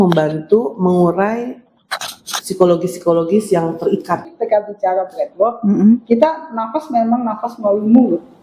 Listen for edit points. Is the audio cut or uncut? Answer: cut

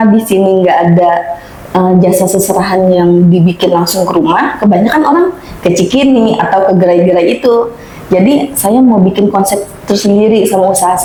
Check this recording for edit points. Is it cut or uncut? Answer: uncut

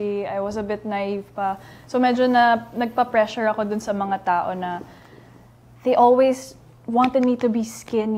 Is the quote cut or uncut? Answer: uncut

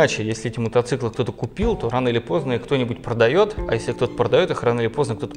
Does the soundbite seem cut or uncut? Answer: uncut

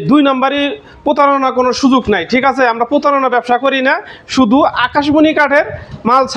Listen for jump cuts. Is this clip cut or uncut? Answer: uncut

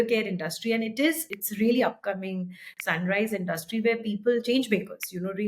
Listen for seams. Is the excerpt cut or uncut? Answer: cut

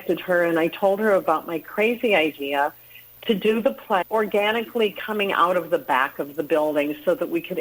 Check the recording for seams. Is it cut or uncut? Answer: uncut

